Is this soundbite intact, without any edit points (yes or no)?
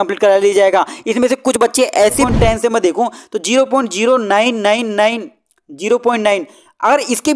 no